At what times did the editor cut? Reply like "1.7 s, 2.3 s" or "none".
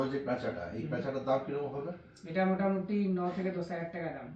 none